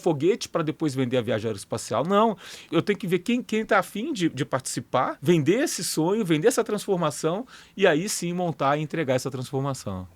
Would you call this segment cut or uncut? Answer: cut